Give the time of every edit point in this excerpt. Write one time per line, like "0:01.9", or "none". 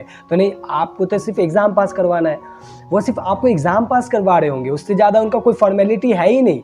none